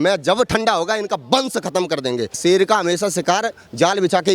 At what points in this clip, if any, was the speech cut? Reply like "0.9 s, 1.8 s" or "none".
2.4 s

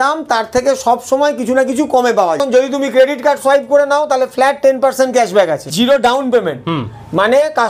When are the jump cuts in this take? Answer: 2.4 s, 5.7 s

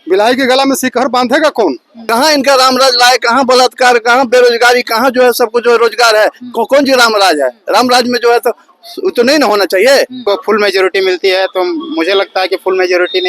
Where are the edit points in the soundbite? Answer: 2.0 s, 10.2 s

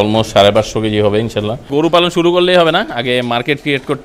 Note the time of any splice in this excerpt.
1.7 s

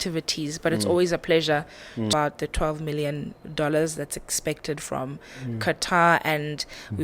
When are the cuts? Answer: 2.1 s

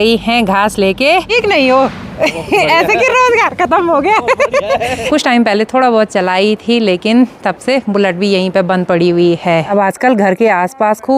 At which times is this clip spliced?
1.3 s, 5.1 s, 9.7 s

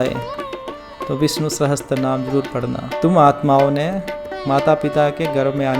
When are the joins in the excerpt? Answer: 2.9 s

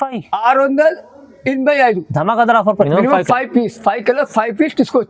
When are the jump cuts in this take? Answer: 2.9 s

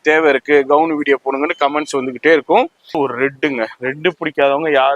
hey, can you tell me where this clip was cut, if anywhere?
3.0 s

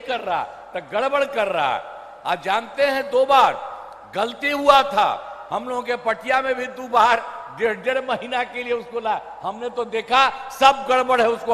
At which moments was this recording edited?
none

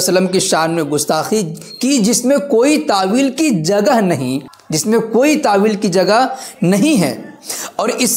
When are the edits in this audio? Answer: none

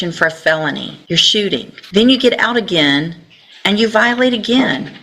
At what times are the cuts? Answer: 0.9 s, 1.8 s

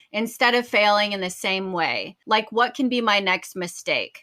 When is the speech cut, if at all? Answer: 2.1 s

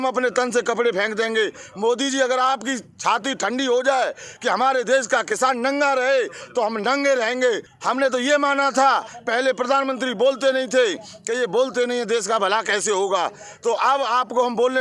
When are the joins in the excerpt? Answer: 7.7 s

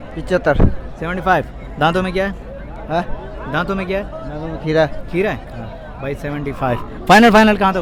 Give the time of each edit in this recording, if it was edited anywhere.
none

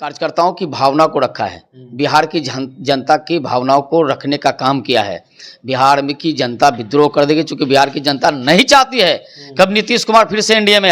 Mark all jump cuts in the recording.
none

